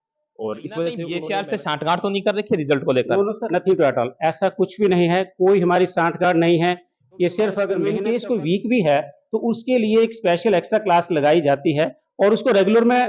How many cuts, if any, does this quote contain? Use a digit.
2